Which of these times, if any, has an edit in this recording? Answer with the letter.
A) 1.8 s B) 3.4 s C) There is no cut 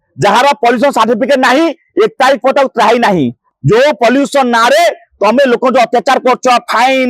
B